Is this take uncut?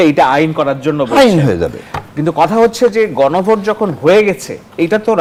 yes; 0 cuts

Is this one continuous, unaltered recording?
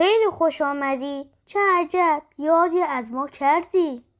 yes; 0 cuts

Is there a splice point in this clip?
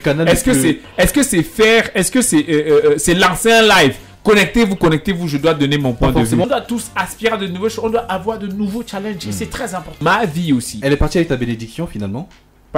yes; 2 cuts; at 6.5 s, 10.0 s

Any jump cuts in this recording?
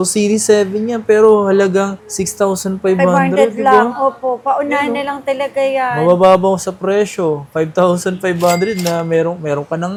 no; 0 cuts

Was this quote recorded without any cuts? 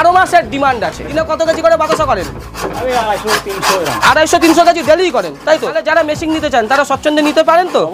no; 2 cuts; at 1.2 s, 5.8 s

